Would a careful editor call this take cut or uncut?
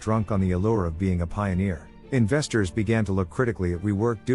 uncut